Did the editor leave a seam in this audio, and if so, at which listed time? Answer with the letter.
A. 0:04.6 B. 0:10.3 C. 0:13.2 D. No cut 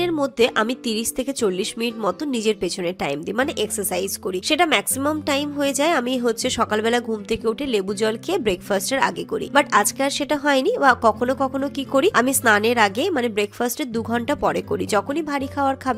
D